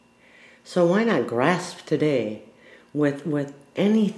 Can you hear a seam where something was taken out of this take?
no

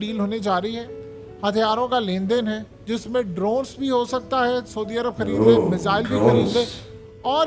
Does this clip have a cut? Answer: no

